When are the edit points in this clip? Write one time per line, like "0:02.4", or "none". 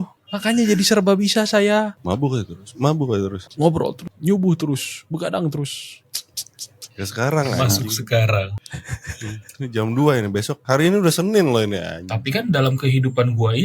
0:12.0